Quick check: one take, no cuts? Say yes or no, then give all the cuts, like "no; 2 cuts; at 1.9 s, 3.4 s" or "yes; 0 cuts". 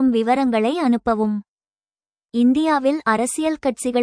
no; 1 cut; at 2.1 s